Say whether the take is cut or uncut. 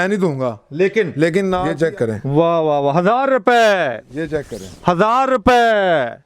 cut